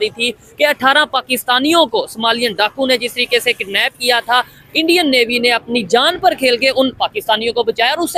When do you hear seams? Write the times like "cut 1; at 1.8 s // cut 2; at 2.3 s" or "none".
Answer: none